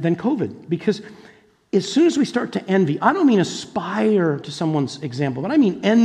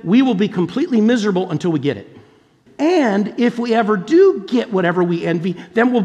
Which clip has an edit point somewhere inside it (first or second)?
second